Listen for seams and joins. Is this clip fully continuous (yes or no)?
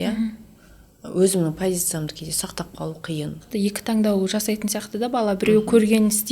no